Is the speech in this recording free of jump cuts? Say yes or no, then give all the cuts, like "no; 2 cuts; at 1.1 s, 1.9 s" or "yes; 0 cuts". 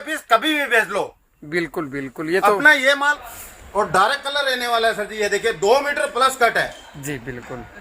no; 1 cut; at 3.1 s